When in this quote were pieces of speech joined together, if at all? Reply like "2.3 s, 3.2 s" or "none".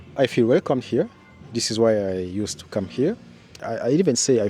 3.6 s